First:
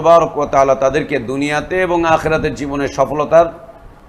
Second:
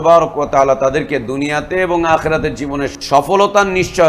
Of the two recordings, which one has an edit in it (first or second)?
second